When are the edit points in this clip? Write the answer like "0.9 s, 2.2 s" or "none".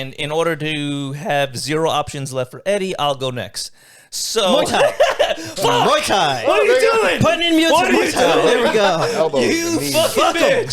none